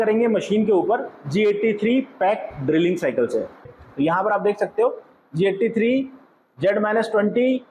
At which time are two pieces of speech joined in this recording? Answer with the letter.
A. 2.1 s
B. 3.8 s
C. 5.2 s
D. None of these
B